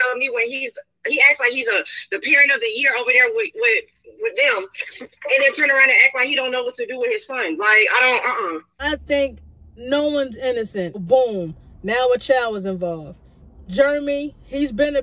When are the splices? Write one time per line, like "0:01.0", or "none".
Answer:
0:08.7
0:11.0